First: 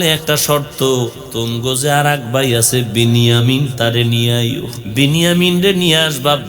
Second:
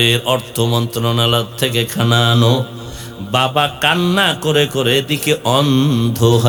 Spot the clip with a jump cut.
first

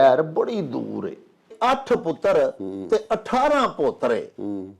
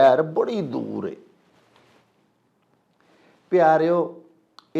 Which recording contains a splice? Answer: first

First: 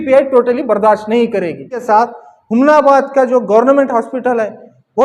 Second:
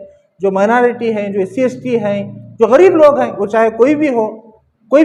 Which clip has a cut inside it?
first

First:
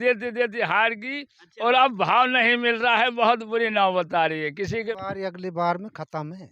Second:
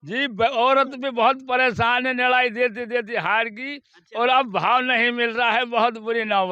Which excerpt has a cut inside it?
first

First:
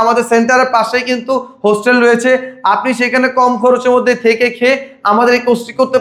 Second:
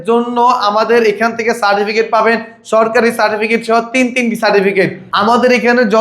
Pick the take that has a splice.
second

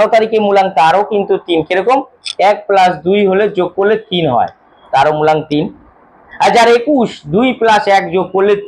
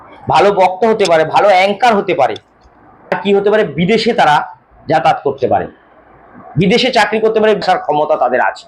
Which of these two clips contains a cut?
second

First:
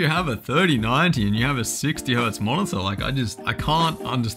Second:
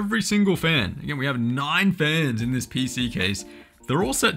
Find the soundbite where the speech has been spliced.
first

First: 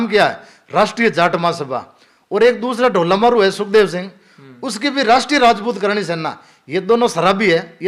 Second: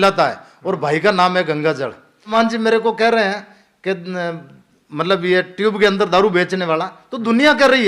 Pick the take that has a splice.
second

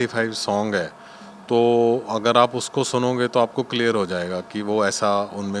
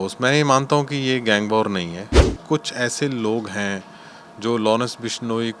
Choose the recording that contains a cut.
second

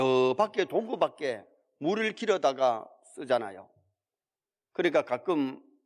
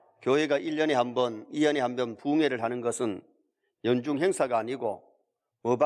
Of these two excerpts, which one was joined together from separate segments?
second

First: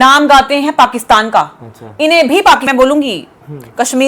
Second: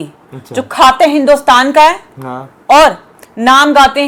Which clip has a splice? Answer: first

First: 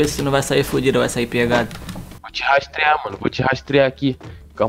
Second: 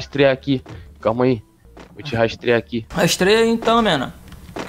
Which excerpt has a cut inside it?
second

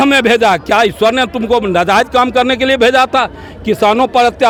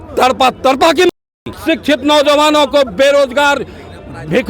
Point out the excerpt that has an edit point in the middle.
second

